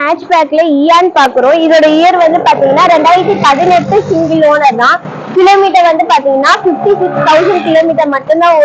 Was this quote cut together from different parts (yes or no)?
no